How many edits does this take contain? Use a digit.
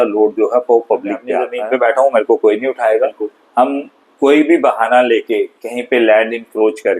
1